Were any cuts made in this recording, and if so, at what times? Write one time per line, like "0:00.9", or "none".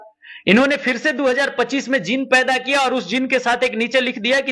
none